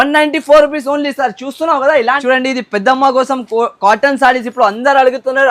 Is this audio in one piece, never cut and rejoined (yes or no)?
no